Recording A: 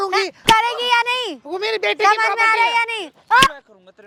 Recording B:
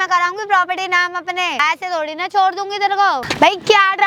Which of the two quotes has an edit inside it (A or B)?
B